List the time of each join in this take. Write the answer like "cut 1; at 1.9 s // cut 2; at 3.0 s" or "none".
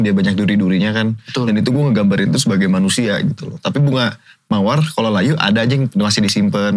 cut 1; at 3.5 s

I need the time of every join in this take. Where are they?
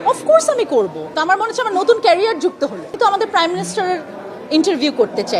cut 1; at 1.1 s // cut 2; at 2.9 s

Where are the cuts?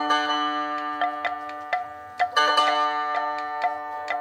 none

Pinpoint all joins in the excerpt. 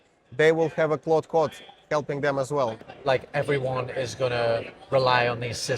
cut 1; at 2.9 s

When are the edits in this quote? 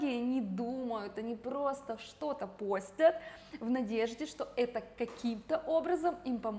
none

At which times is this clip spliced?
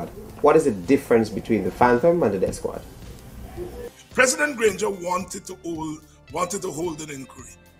cut 1; at 3.9 s

